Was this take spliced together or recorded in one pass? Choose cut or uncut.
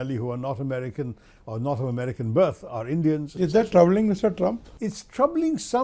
cut